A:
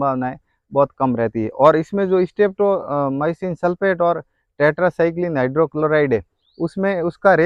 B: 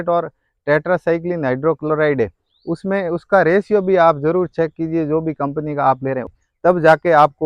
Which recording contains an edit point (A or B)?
B